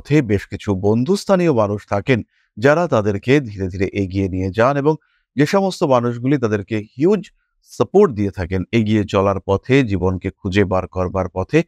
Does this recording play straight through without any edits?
yes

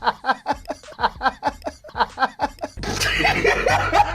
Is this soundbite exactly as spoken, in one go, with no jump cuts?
no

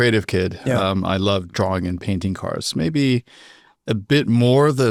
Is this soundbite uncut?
yes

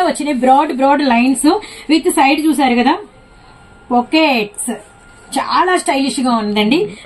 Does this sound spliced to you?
no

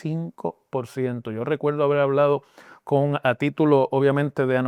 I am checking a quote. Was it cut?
no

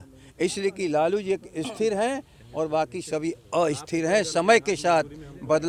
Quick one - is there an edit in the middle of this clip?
no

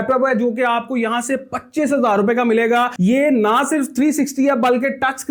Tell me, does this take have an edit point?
no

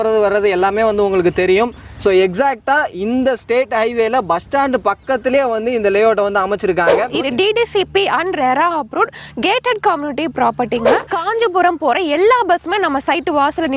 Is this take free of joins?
no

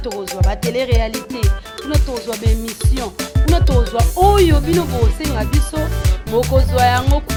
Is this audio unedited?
yes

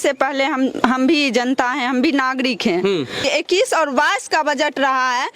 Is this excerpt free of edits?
no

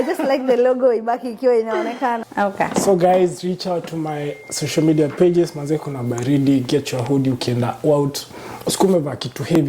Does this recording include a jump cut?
yes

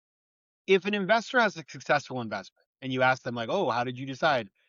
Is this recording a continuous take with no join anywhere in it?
yes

